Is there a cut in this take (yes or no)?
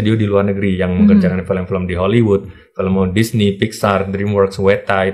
no